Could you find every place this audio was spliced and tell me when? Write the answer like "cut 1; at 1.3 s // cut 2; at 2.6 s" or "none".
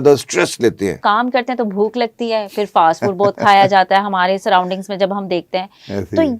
cut 1; at 1.0 s